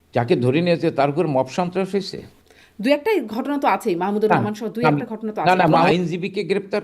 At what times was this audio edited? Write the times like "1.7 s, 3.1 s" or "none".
5.9 s